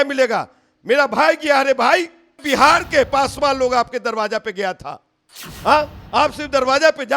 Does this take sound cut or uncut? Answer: cut